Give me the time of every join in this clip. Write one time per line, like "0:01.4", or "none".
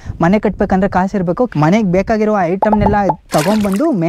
0:01.5